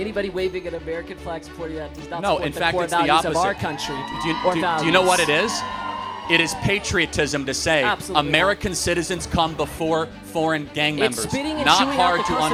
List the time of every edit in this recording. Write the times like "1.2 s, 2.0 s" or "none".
none